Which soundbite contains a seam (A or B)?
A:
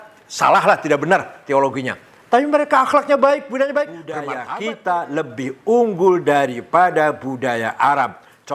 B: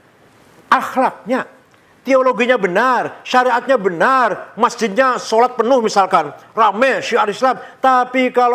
A